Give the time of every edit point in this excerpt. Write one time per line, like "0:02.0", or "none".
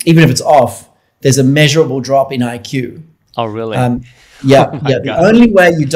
none